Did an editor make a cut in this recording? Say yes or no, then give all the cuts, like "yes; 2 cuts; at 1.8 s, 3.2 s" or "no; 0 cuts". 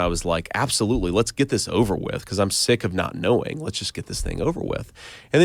no; 0 cuts